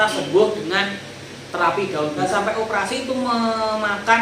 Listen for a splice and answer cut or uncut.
cut